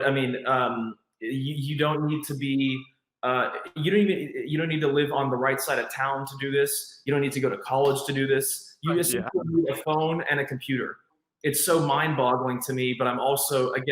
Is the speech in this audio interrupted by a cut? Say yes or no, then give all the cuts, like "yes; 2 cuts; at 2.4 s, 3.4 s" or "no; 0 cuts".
yes; 1 cut; at 11.1 s